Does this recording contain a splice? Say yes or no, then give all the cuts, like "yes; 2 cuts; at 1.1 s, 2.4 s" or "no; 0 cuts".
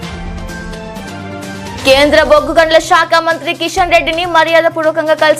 yes; 1 cut; at 1.0 s